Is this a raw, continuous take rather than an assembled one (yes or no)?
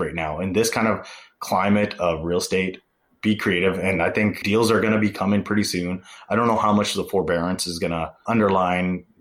no